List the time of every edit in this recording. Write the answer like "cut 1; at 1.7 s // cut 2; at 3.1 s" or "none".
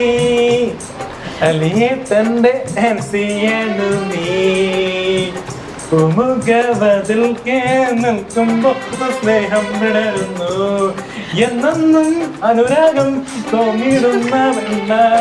none